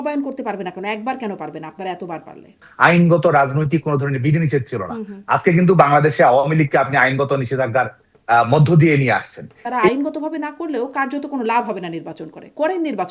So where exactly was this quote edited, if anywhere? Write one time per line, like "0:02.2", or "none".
0:02.7
0:09.9